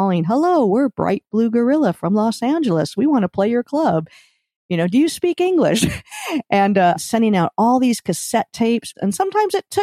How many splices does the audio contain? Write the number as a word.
two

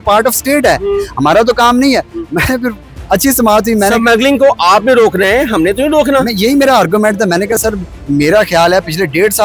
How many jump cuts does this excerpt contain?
zero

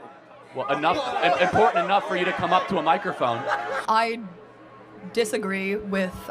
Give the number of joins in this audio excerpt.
one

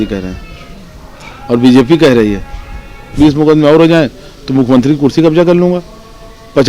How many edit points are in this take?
one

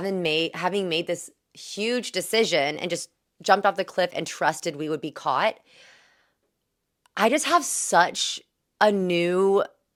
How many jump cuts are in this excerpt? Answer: zero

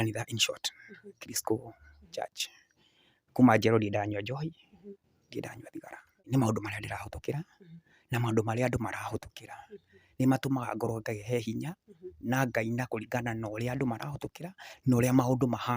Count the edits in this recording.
one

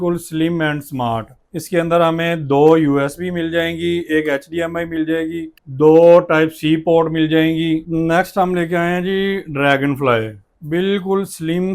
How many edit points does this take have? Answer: two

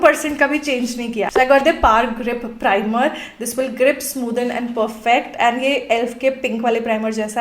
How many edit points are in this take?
zero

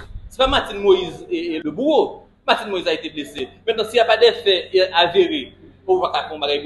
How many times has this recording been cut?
one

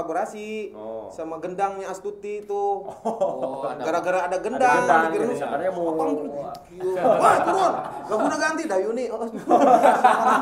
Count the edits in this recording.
zero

